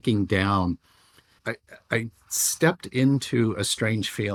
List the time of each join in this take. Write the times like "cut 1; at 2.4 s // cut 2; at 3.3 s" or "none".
none